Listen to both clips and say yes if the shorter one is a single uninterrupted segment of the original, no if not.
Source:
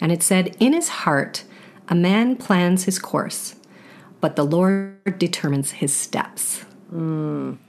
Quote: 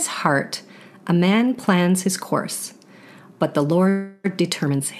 yes